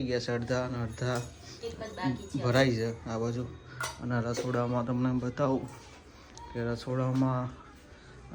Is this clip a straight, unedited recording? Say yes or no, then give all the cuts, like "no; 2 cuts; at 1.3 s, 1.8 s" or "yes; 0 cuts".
yes; 0 cuts